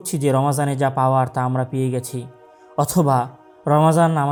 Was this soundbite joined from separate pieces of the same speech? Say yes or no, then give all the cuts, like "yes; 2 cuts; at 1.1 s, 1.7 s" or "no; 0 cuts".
no; 0 cuts